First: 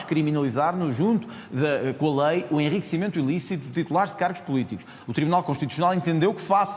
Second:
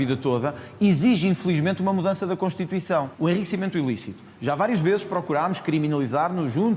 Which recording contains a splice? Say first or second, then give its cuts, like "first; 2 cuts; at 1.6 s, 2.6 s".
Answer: second; 1 cut; at 3.1 s